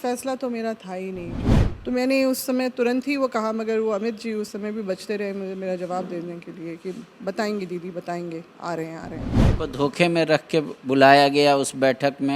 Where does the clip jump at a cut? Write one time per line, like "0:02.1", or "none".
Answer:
0:01.4
0:09.3

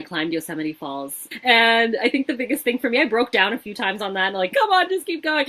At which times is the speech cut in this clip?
0:01.3
0:04.5

